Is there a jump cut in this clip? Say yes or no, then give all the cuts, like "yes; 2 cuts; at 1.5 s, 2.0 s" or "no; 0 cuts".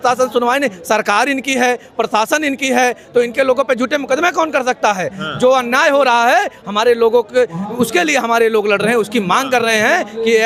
no; 0 cuts